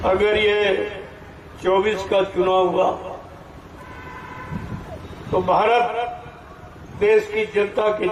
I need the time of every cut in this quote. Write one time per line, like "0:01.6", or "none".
none